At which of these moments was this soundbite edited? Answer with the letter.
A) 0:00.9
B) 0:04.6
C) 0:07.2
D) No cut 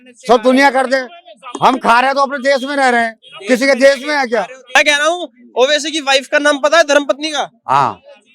B